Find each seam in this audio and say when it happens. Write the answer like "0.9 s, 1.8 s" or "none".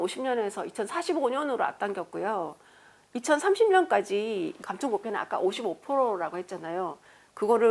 4.6 s